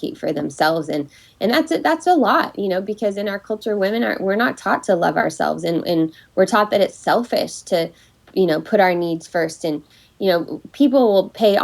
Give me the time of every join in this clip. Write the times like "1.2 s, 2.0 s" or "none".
none